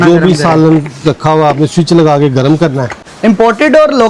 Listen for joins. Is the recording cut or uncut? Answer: cut